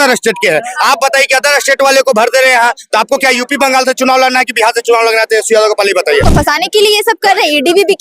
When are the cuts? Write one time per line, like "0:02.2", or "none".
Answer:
0:06.2